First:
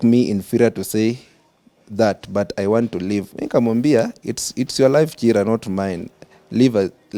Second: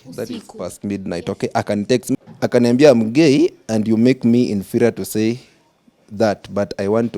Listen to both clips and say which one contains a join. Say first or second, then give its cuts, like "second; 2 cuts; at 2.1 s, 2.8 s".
second; 1 cut; at 2.2 s